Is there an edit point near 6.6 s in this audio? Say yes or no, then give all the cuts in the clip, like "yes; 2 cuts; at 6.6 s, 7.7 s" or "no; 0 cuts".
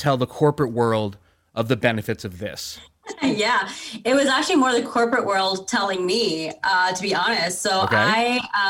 no; 0 cuts